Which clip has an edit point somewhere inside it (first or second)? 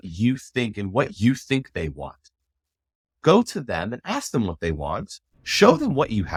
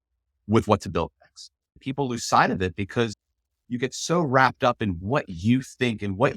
second